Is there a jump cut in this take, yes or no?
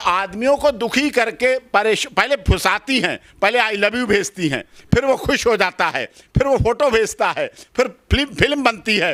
no